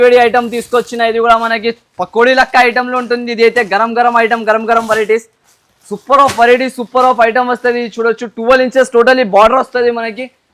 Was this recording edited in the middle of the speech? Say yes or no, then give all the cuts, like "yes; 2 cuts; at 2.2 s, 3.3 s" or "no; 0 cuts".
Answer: no; 0 cuts